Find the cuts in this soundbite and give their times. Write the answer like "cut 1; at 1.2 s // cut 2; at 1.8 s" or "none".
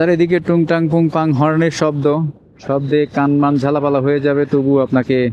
none